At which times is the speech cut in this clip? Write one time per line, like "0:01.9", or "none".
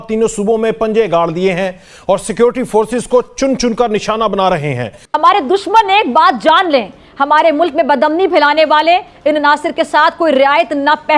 0:05.0